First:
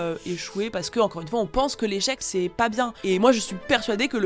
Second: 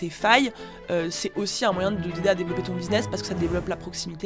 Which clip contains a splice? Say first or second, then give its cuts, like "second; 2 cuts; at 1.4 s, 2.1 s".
first; 1 cut; at 2.6 s